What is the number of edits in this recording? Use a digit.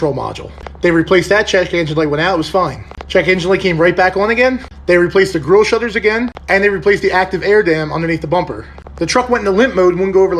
1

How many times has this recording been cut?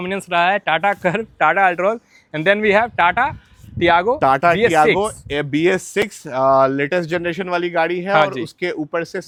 0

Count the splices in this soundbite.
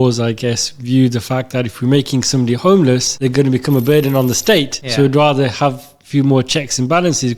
2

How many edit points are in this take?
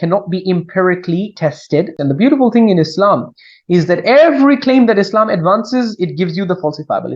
1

